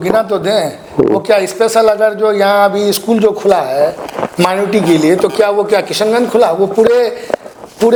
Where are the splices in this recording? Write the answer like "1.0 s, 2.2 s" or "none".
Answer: none